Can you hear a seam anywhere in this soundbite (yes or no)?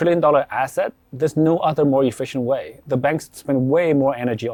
no